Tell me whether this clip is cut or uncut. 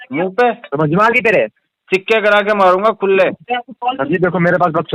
cut